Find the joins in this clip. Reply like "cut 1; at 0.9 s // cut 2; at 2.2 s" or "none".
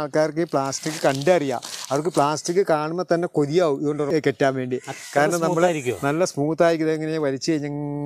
cut 1; at 4.1 s